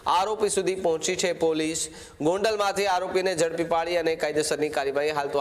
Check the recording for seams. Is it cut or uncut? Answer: uncut